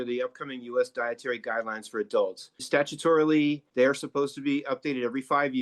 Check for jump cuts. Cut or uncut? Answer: cut